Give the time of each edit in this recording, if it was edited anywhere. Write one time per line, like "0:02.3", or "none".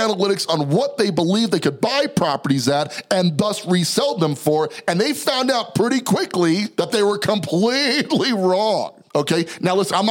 0:06.7
0:09.0